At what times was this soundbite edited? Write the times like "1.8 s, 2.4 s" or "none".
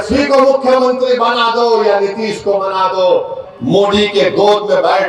3.4 s